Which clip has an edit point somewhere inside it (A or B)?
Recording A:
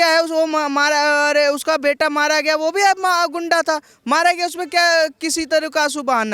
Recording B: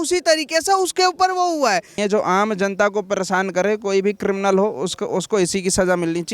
B